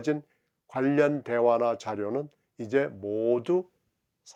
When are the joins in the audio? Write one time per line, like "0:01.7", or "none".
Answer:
none